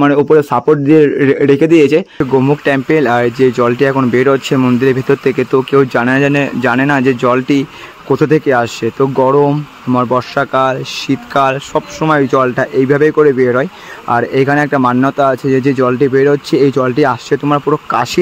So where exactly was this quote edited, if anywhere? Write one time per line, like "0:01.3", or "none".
0:02.2